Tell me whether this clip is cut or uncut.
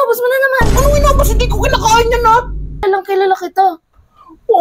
cut